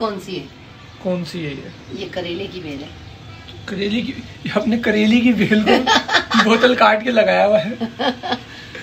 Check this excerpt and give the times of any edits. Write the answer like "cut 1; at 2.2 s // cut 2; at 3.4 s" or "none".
cut 1; at 7.9 s